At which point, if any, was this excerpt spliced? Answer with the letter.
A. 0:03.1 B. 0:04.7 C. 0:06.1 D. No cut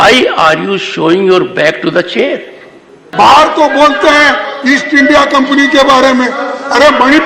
A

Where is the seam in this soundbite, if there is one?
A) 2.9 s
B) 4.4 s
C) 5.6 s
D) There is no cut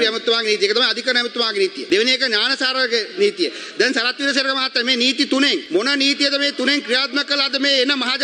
D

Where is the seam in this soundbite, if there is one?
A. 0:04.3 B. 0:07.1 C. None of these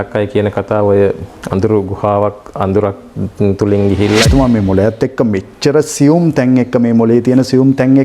A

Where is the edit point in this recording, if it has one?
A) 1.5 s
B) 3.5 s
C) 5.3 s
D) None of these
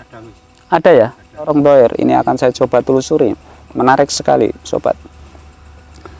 A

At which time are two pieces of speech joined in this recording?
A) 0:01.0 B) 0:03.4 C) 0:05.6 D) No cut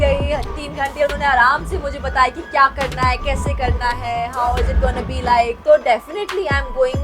C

